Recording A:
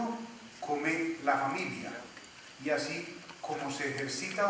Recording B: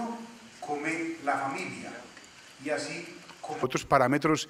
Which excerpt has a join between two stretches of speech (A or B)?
A